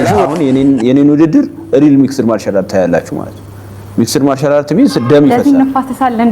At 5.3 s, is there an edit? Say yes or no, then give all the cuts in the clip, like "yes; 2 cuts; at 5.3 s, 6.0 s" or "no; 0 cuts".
yes; 1 cut; at 5.3 s